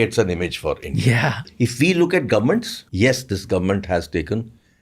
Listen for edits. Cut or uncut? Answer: cut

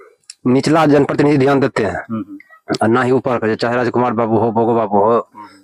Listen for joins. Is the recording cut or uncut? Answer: uncut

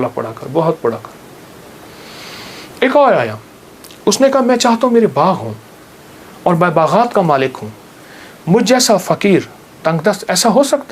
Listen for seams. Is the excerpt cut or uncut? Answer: uncut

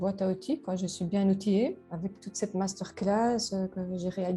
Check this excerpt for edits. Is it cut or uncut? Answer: cut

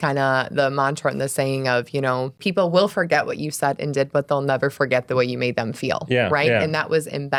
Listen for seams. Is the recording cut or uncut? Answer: uncut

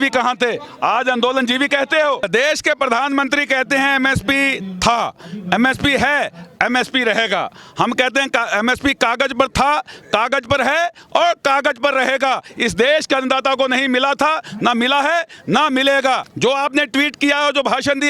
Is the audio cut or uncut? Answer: cut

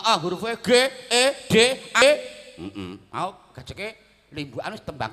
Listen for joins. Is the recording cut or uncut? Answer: cut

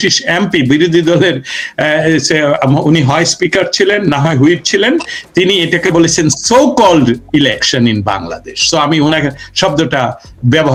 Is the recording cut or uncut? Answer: uncut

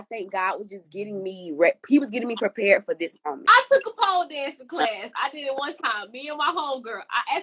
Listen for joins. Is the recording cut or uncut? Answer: cut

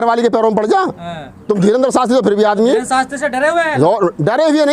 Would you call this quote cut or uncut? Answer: uncut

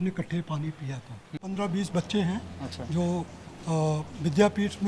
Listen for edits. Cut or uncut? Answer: cut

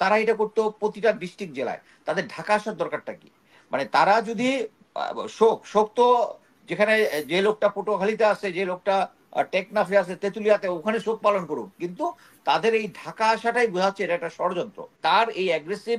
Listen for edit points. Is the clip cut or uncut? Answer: cut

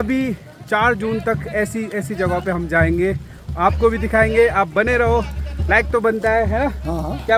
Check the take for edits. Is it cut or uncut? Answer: uncut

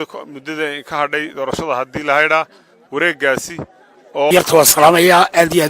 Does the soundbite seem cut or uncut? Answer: cut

